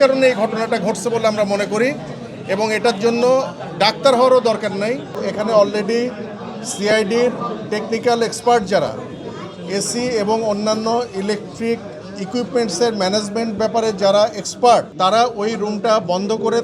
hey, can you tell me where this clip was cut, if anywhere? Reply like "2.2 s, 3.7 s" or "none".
5.2 s, 14.9 s